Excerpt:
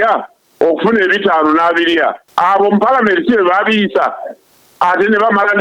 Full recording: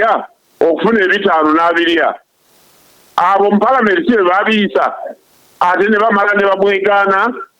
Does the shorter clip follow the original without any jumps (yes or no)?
no